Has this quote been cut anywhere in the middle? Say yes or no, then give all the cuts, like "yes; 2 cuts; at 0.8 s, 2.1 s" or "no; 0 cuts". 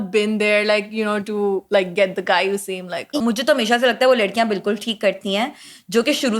yes; 1 cut; at 3.1 s